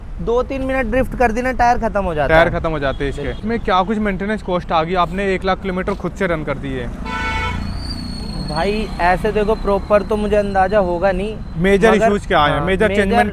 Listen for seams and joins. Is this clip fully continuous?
yes; 0 cuts

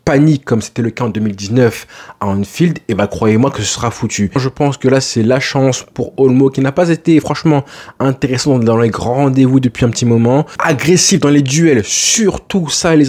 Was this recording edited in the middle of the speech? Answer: yes; 2 cuts; at 4.4 s, 10.6 s

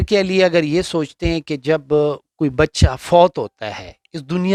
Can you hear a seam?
no; 0 cuts

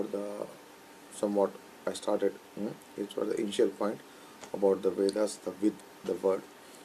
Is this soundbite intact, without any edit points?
yes; 0 cuts

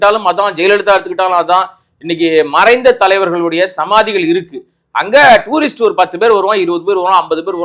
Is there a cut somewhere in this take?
no; 0 cuts

